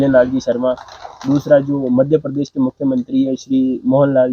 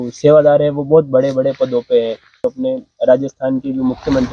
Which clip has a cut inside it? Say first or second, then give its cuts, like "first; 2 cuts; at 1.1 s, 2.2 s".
second; 1 cut; at 2.3 s